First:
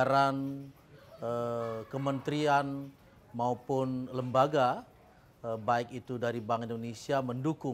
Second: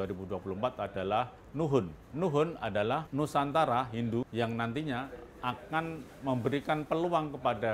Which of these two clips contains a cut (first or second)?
second